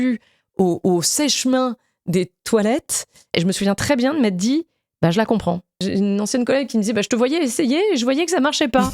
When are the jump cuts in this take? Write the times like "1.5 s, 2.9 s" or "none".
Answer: 3.3 s, 5.8 s